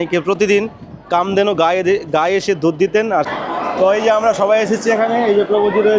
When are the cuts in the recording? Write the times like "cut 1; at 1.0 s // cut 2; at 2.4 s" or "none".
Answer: cut 1; at 3.3 s

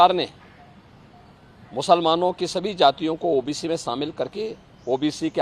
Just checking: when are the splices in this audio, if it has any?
none

